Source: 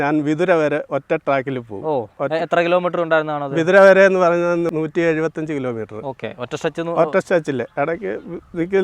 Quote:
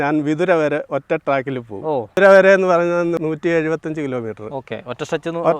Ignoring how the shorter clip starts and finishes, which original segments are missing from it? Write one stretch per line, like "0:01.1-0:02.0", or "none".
0:02.1-0:03.7

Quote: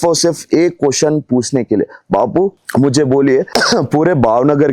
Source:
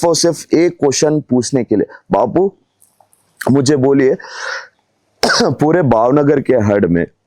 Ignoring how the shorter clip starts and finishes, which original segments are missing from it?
0:02.6-0:03.3
0:04.2-0:05.2

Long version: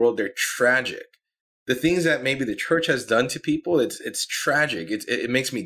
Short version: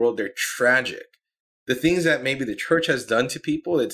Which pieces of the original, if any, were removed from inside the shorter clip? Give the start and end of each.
none

